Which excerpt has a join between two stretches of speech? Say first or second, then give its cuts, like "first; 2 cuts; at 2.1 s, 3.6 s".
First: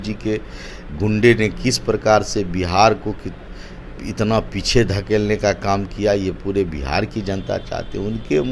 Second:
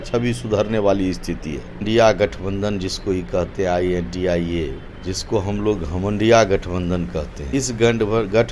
second; 3 cuts; at 1.8 s, 4.9 s, 7.4 s